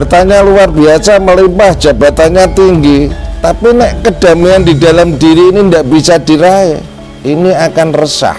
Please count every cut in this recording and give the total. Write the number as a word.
zero